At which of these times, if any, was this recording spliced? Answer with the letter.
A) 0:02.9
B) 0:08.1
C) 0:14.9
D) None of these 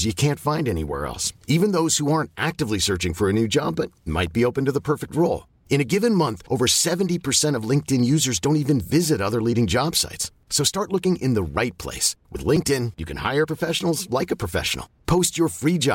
D